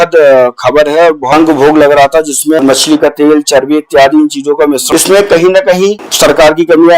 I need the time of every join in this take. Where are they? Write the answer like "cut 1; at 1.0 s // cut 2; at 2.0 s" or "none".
cut 1; at 1.3 s // cut 2; at 2.6 s // cut 3; at 4.8 s // cut 4; at 6.1 s